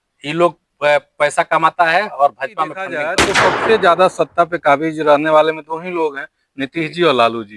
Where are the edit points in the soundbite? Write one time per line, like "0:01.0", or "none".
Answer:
0:03.2